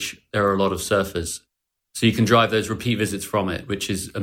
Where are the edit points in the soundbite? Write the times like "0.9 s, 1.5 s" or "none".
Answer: none